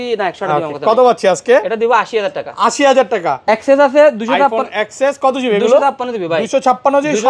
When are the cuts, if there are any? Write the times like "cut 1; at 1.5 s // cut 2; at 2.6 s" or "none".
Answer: cut 1; at 3.4 s